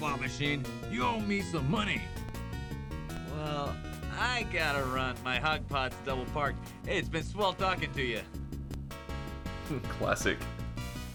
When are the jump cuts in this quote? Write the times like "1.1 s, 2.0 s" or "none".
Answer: none